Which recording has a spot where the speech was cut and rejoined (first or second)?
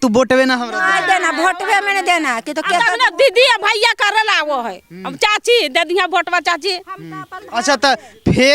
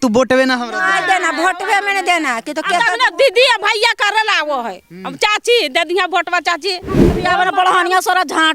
second